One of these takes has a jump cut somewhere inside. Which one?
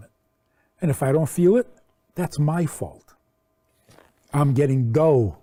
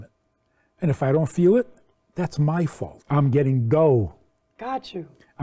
second; 1 cut; at 3.0 s

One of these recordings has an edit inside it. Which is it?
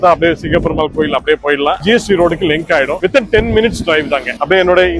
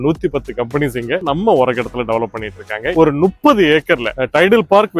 second; 2 cuts; at 1.2 s, 2.9 s

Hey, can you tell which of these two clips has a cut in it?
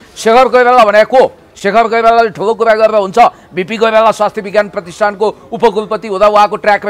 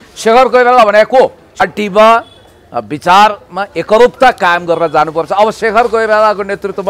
second; 1 cut; at 1.6 s

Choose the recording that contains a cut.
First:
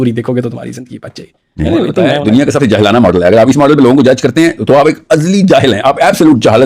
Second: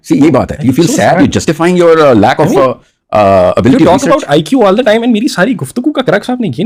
first; 1 cut; at 2.2 s

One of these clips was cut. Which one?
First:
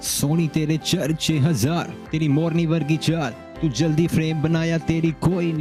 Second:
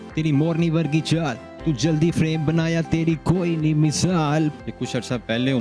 second; 1 cut; at 4.6 s

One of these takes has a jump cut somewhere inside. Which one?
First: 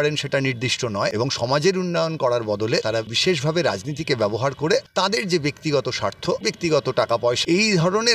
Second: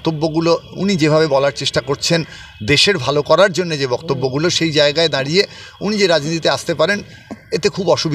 first; 5 cuts; at 1.1 s, 3.0 s, 4.9 s, 6.4 s, 7.4 s

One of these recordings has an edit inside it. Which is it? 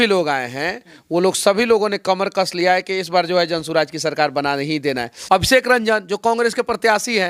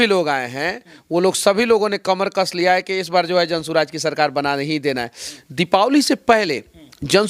first; 1 cut; at 5.1 s

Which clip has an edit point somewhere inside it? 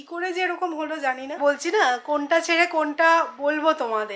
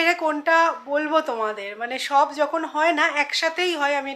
first; 1 cut; at 1.4 s

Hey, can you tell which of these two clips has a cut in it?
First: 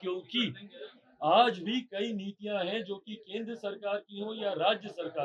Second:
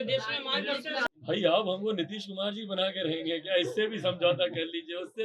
second; 1 cut; at 1.1 s

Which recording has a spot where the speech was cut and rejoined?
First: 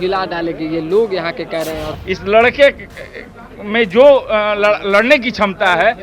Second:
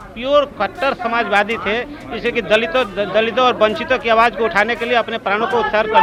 first; 1 cut; at 1.9 s

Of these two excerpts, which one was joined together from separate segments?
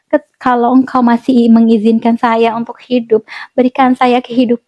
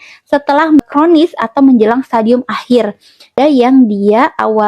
second; 2 cuts; at 0.8 s, 3.4 s

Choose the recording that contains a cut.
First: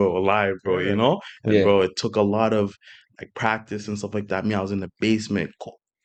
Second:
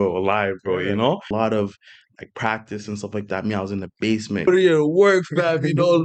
second; 2 cuts; at 1.3 s, 4.5 s

